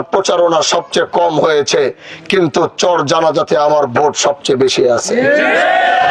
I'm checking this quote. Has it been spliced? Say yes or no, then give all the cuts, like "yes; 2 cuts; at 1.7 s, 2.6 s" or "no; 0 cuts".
no; 0 cuts